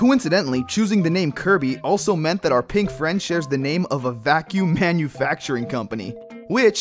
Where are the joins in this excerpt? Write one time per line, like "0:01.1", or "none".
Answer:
none